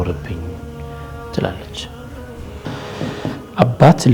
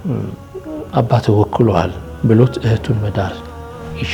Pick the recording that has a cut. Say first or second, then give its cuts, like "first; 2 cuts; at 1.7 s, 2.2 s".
first; 1 cut; at 2.5 s